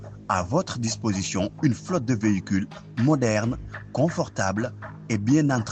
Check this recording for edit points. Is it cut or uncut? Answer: uncut